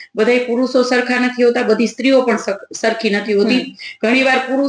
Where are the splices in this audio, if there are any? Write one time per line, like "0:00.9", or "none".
none